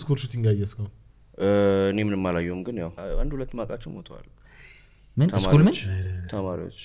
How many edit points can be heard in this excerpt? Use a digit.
1